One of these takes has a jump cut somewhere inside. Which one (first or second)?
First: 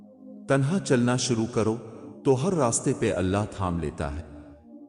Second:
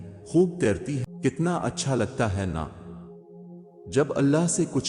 second